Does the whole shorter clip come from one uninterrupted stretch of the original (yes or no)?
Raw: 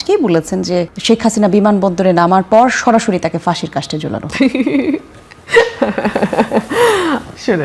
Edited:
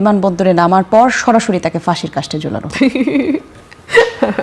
yes